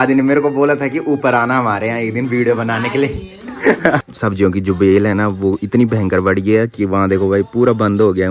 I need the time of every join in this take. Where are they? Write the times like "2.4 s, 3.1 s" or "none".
4.1 s